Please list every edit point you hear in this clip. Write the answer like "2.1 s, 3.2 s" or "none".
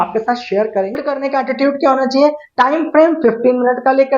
1.0 s